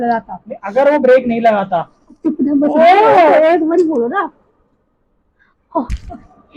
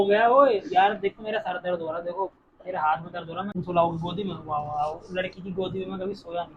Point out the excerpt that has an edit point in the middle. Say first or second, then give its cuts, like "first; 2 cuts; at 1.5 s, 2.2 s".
second; 1 cut; at 3.5 s